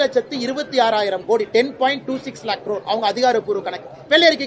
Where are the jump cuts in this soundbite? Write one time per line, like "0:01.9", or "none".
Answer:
none